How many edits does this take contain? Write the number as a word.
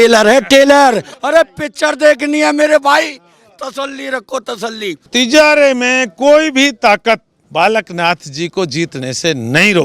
three